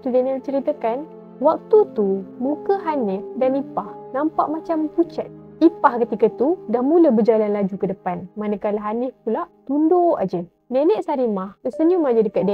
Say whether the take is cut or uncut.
uncut